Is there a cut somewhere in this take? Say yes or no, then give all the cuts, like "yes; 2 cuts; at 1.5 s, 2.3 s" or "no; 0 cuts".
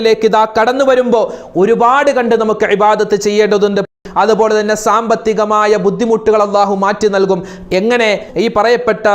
yes; 2 cuts; at 3.9 s, 8.2 s